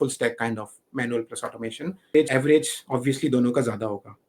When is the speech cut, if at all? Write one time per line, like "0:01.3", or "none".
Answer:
0:02.2